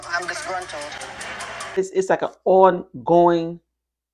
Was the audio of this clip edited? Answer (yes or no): yes